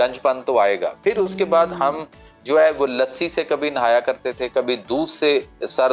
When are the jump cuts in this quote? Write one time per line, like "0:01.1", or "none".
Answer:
none